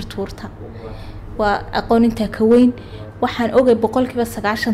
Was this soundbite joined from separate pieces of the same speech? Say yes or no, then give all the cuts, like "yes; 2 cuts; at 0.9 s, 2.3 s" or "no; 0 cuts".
no; 0 cuts